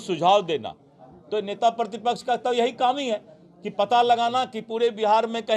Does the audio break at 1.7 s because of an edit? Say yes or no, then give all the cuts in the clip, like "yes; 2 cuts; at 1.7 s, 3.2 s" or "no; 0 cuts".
no; 0 cuts